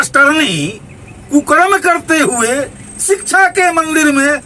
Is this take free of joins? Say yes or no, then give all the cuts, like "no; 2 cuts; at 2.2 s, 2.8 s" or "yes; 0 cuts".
yes; 0 cuts